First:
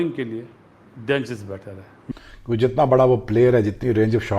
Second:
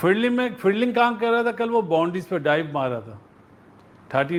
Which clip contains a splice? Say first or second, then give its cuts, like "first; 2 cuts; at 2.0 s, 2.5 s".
first; 1 cut; at 2.1 s